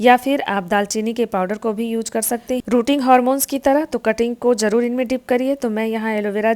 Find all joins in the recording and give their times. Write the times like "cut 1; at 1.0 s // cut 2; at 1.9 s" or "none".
none